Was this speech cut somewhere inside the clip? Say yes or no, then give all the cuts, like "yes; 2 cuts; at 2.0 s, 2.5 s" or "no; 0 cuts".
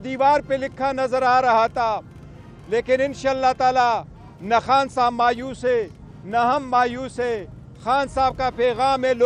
no; 0 cuts